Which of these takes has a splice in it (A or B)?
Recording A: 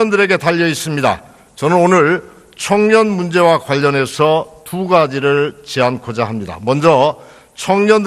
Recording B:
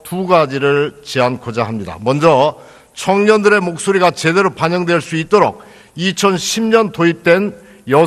A